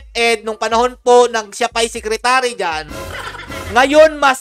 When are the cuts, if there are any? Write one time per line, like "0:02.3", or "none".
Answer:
none